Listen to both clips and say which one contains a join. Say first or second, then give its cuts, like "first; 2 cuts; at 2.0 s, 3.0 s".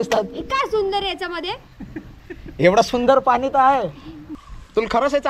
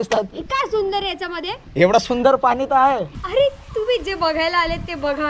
second; 2 cuts; at 1.6 s, 3.2 s